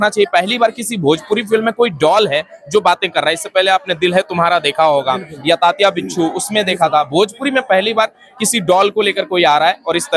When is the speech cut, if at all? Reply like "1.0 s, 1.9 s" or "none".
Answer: none

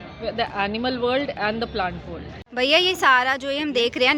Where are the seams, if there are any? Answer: 2.5 s

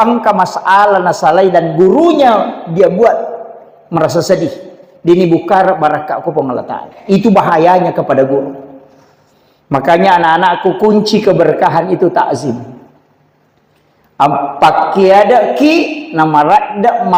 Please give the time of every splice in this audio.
none

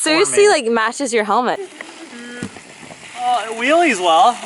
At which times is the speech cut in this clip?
1.6 s

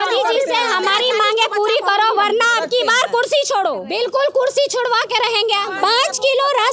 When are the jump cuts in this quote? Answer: 3.8 s, 5.7 s

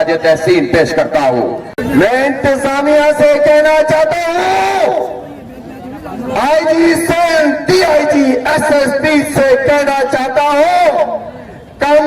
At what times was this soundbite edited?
1.7 s

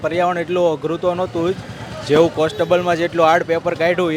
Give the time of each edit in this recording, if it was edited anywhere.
none

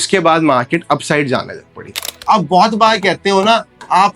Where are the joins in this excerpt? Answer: 2.1 s

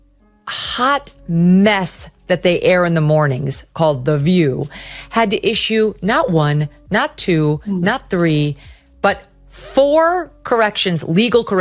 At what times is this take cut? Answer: none

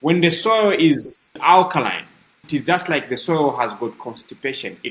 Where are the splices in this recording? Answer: 1.4 s, 2.4 s

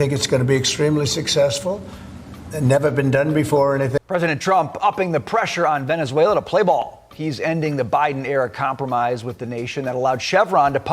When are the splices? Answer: 4.0 s

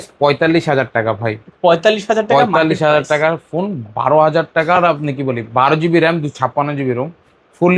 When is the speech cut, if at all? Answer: none

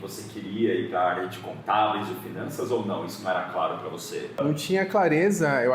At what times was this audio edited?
4.4 s

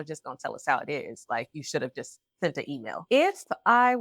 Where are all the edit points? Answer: 3.0 s

